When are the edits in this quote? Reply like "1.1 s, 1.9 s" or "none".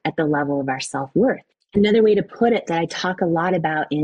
1.5 s